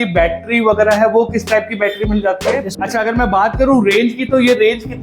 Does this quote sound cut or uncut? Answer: cut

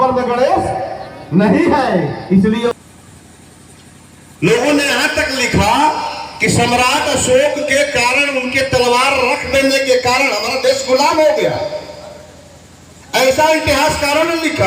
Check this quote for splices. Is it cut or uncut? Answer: cut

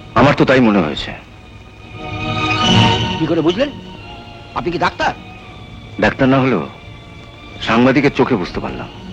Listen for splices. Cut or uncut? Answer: uncut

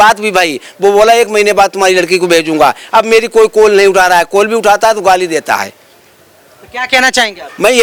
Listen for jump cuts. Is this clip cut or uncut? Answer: uncut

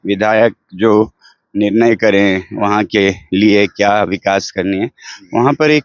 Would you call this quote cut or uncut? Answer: uncut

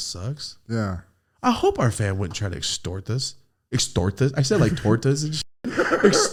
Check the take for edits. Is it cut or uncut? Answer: uncut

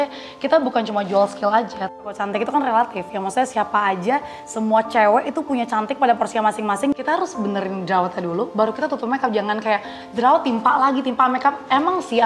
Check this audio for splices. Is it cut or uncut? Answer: cut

